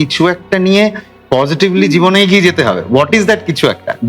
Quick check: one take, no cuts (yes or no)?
yes